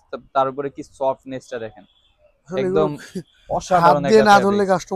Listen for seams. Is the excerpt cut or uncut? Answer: uncut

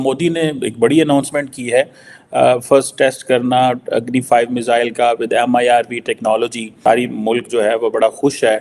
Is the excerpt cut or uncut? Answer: cut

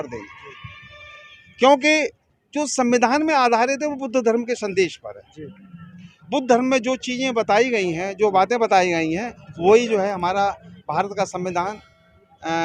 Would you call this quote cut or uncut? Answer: uncut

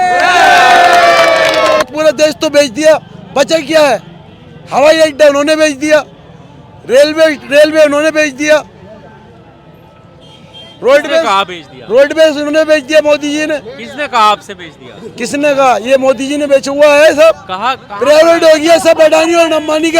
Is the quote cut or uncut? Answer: cut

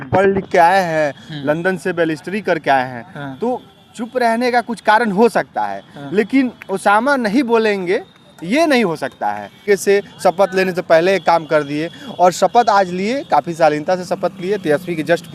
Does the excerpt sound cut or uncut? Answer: cut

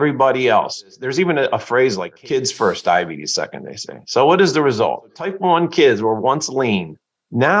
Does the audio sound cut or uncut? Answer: cut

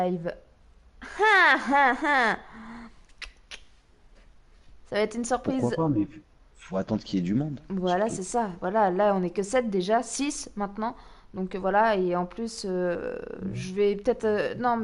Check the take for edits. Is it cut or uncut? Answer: cut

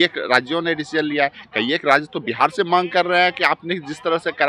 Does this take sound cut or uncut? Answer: uncut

